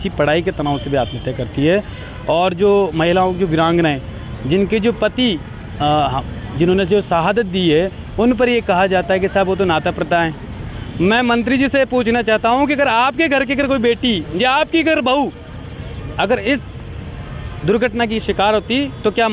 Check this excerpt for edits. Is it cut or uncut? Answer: uncut